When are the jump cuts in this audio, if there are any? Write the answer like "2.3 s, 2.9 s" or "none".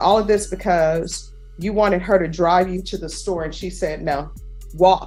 none